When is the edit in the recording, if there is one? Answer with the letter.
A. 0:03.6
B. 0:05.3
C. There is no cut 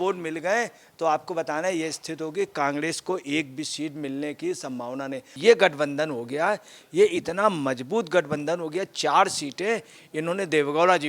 B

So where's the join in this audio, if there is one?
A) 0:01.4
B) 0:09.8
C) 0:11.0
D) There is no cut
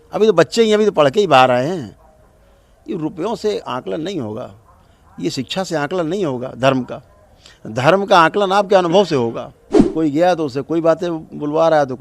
B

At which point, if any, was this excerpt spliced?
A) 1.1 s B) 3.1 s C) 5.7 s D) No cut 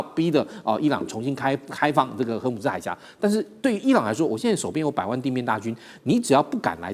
D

